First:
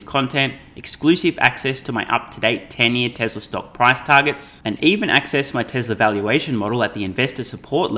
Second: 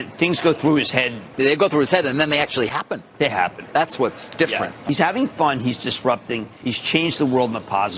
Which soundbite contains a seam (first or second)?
second